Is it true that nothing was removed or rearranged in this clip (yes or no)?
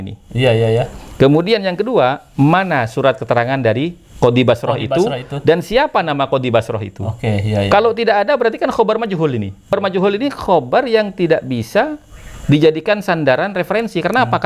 no